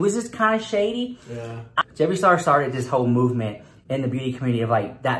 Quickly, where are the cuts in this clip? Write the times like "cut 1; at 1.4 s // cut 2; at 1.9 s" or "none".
cut 1; at 1.7 s